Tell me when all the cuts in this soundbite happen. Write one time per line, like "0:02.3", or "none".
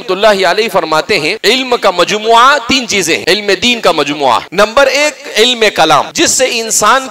0:01.3
0:03.2
0:04.5
0:06.1